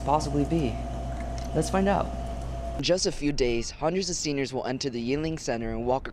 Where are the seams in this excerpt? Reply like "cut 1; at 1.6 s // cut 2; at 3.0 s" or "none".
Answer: cut 1; at 2.7 s